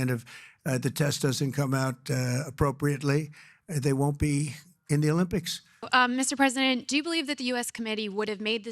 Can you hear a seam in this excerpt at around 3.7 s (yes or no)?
no